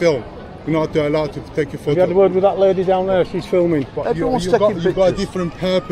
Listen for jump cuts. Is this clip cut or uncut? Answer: cut